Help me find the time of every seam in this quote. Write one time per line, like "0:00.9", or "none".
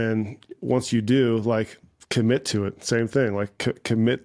none